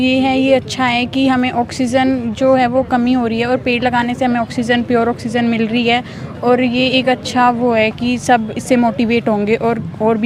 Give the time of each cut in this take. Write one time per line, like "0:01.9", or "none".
none